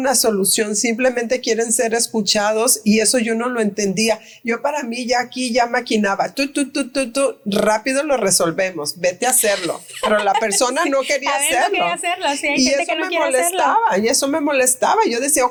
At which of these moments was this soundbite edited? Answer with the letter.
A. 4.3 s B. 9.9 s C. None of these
C